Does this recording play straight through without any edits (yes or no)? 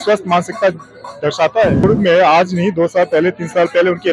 no